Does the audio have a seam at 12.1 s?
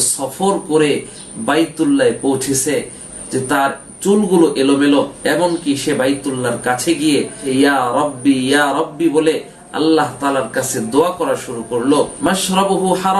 yes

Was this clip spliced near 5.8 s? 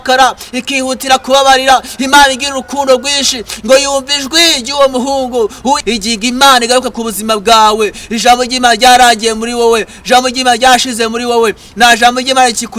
yes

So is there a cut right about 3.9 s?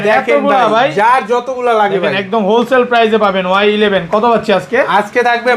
no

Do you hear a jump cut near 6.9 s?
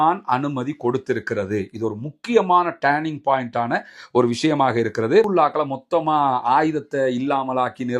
no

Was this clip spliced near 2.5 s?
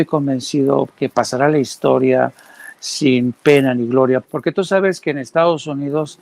no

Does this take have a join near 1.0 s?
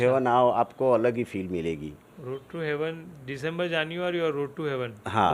no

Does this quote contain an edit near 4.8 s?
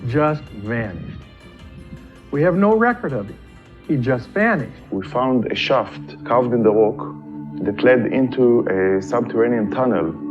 yes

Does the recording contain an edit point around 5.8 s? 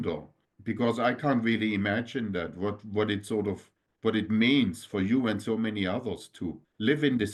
no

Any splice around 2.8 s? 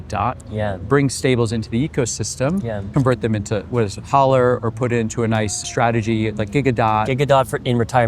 yes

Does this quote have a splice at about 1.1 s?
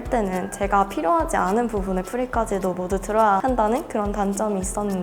no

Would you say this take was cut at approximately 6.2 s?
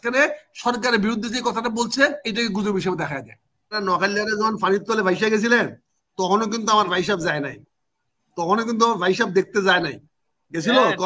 no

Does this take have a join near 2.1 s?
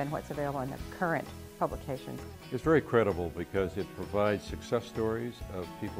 yes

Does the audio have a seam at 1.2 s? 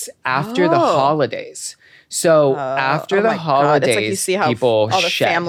no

